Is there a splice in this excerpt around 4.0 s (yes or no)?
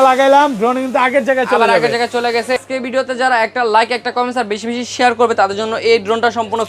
no